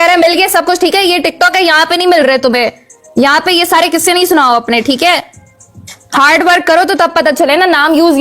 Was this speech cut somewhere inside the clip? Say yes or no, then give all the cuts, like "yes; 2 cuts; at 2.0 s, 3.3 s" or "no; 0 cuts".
no; 0 cuts